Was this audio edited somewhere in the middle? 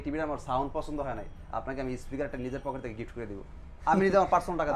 no; 0 cuts

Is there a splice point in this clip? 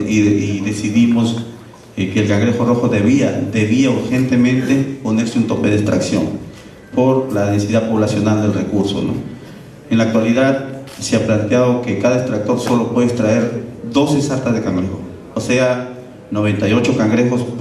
yes; 1 cut; at 12.7 s

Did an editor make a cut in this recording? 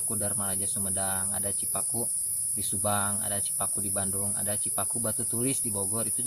no; 0 cuts

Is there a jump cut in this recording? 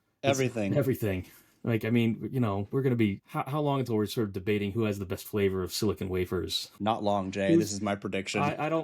yes; 2 cuts; at 3.2 s, 6.6 s

